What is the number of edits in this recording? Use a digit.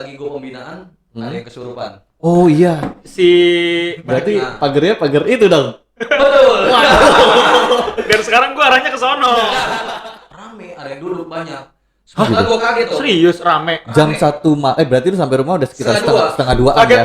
2